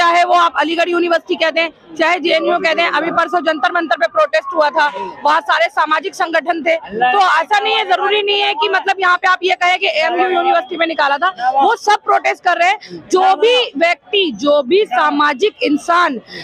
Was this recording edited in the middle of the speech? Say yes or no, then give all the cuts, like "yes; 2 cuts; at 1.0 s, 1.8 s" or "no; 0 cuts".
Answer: no; 0 cuts